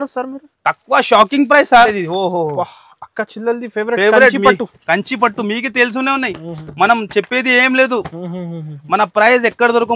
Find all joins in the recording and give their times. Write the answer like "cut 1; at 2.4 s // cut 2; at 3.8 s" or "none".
cut 1; at 1.9 s